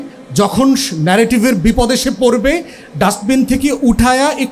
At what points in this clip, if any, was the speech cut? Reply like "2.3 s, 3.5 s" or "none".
none